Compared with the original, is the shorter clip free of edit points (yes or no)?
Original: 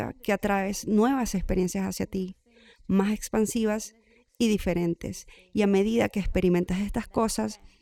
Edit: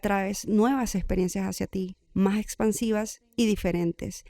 no